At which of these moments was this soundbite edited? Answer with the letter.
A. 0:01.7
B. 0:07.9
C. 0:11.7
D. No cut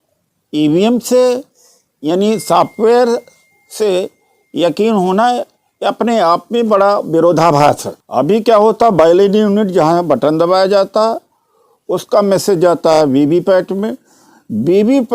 B